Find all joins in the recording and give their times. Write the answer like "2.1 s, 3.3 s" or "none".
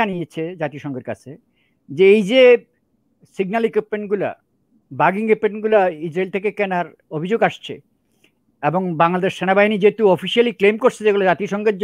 none